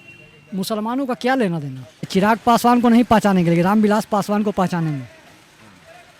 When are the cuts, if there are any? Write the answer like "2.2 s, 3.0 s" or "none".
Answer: 2.1 s